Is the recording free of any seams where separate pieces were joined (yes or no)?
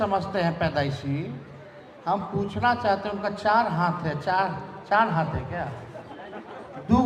yes